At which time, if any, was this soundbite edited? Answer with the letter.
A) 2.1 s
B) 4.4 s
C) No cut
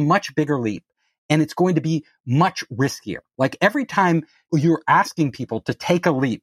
B